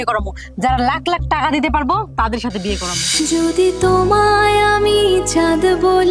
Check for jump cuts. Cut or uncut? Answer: cut